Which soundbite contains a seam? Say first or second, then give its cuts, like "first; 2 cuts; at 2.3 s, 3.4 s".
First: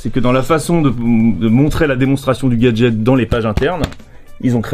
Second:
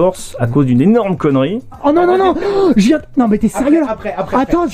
second; 1 cut; at 1.8 s